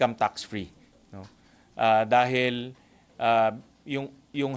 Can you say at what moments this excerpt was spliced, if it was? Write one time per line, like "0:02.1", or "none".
none

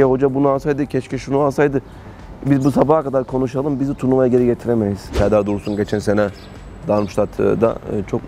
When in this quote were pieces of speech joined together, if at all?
0:05.1

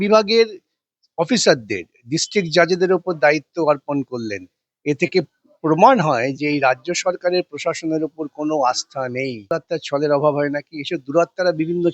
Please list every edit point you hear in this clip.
0:09.5

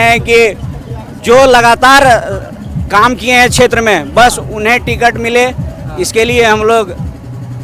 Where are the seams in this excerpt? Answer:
none

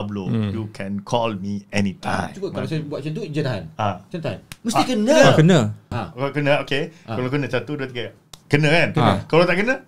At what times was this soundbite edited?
0:02.3
0:06.0

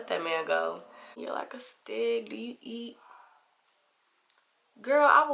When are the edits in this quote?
0:01.1

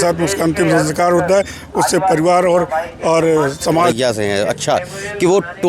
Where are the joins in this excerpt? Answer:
0:03.9

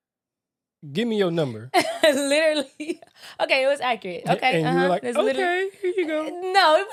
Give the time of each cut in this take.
none

